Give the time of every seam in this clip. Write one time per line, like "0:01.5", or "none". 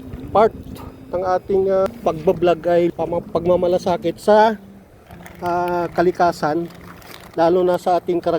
0:01.9
0:02.9